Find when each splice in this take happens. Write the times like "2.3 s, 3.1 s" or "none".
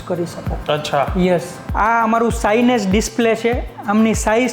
1.6 s